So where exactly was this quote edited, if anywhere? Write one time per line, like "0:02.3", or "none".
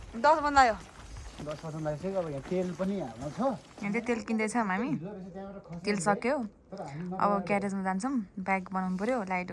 0:03.7